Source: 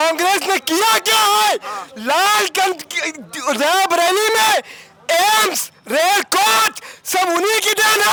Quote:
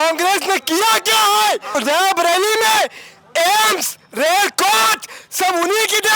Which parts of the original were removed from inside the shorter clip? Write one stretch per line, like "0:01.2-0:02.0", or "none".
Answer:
0:01.7-0:03.4